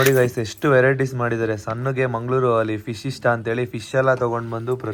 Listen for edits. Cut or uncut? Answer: uncut